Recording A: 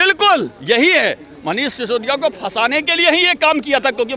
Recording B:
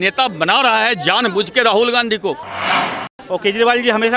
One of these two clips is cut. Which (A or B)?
B